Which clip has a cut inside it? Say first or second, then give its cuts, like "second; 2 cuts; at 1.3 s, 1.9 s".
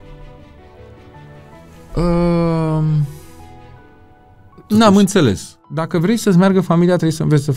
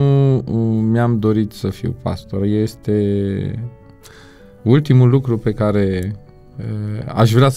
first; 1 cut; at 5.7 s